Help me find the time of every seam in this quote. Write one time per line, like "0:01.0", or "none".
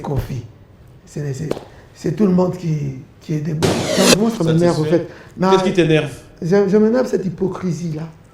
0:03.9